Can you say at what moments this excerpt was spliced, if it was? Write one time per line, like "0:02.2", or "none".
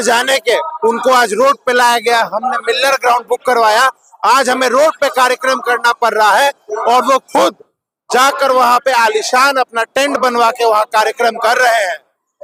none

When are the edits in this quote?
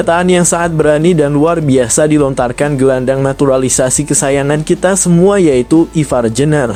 none

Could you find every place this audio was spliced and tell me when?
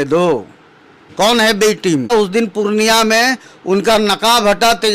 0:02.1

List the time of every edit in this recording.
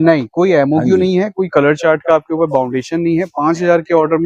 none

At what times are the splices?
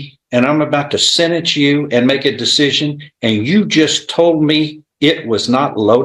none

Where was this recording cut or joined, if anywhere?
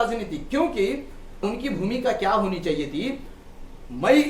0:01.4

